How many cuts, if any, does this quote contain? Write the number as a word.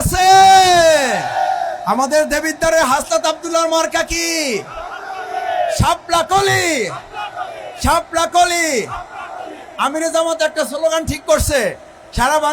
zero